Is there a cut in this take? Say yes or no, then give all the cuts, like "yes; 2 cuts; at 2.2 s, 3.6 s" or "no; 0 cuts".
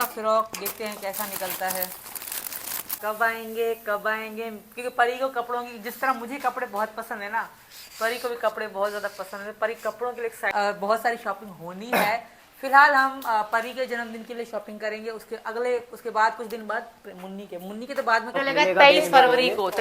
yes; 3 cuts; at 3.0 s, 10.5 s, 18.3 s